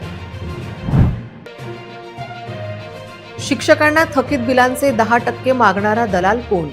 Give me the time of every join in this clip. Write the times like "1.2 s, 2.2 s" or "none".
1.3 s